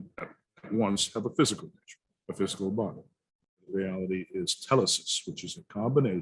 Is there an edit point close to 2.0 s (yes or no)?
no